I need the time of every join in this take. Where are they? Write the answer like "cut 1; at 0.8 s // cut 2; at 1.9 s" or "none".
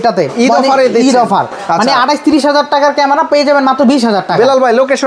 none